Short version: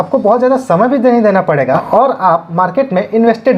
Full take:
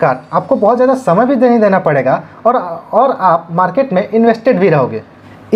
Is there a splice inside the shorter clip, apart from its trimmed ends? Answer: yes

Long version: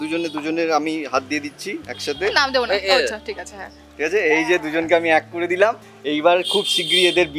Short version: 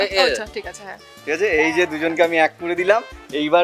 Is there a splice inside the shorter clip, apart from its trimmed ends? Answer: no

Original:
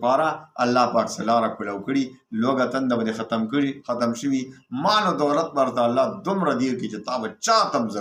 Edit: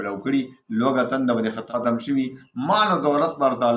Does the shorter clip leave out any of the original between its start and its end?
yes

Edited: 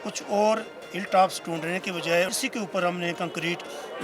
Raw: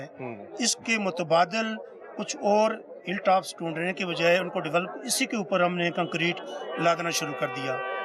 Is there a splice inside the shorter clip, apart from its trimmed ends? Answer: yes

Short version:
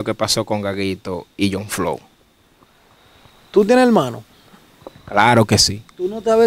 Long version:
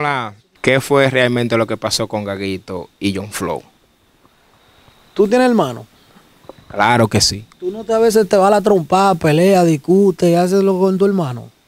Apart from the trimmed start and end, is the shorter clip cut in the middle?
no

